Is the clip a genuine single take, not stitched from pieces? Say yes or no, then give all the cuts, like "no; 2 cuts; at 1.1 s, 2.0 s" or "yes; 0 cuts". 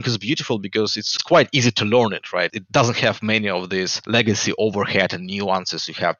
no; 3 cuts; at 1.0 s, 2.6 s, 4.0 s